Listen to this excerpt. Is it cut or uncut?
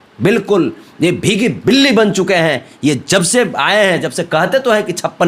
uncut